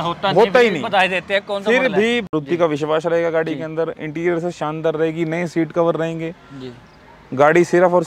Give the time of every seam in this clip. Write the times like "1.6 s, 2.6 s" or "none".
2.3 s